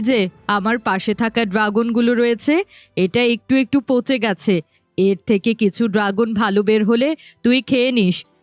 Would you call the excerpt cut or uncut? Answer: uncut